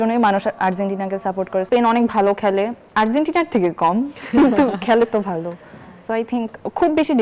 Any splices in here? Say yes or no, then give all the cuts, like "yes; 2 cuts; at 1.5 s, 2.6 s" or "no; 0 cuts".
yes; 2 cuts; at 1.7 s, 2.8 s